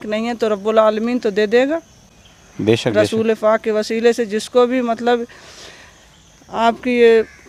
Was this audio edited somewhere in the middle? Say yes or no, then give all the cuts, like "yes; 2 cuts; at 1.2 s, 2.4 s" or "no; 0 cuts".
no; 0 cuts